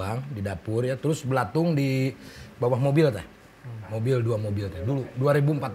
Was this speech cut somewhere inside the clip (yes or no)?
no